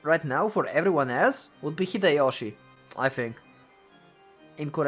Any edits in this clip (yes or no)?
no